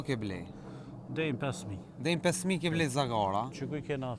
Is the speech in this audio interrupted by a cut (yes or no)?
no